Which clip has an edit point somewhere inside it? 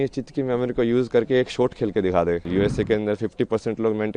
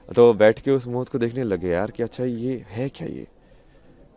first; 1 cut; at 2.4 s

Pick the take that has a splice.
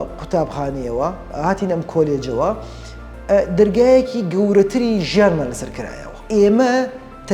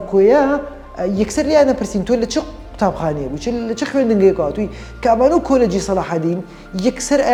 first; 1 cut; at 6.1 s

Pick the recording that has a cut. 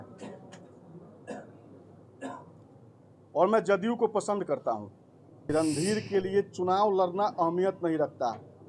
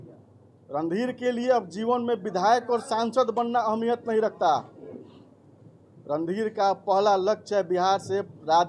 first; 1 cut; at 5.5 s

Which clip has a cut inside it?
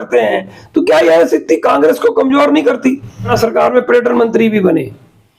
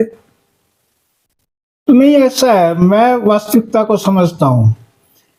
first; 1 cut; at 3.3 s

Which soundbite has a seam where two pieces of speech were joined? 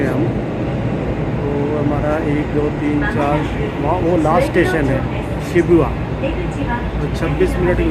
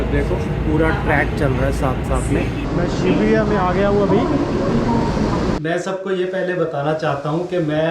second; 2 cuts; at 2.6 s, 5.6 s

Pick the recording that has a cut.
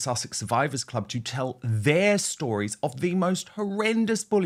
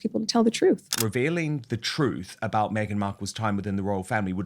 second; 1 cut; at 1.0 s

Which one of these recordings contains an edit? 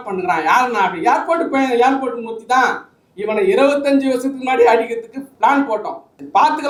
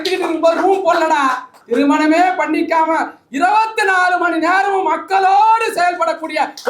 second; 1 cut; at 1.5 s

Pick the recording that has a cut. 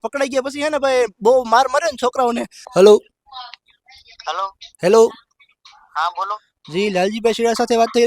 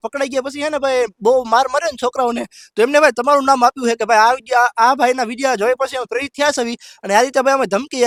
first; 1 cut; at 2.5 s

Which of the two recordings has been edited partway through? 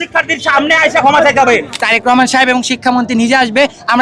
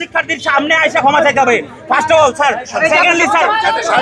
first; 1 cut; at 1.8 s

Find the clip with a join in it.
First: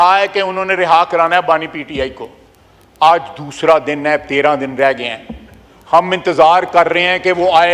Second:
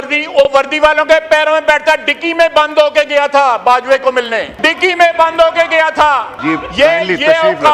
second; 2 cuts; at 4.5 s, 6.3 s

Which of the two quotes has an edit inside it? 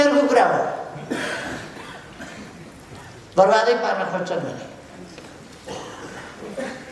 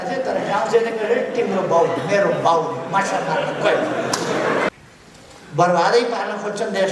second; 1 cut; at 4.7 s

